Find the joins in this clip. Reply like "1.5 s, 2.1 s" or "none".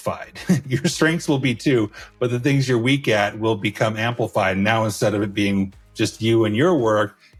none